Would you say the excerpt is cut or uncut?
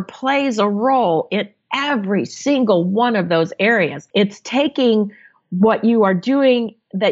cut